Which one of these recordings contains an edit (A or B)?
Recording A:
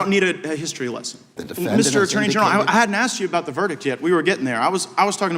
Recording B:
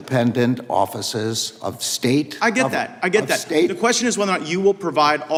A